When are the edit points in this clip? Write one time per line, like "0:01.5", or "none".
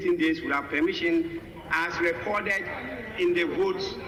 none